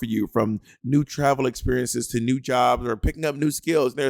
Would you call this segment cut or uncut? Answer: uncut